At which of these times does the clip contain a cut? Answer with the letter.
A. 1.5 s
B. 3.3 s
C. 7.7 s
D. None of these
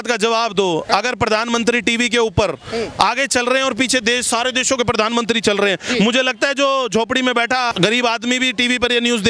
C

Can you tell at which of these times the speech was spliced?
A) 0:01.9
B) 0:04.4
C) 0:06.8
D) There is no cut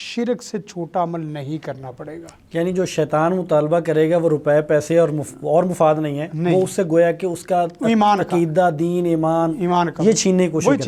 D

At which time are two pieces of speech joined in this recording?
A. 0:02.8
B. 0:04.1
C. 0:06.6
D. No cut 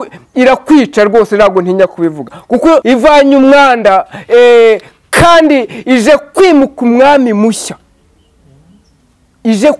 A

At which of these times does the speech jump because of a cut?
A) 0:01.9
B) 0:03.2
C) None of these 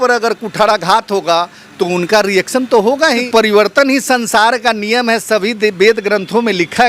B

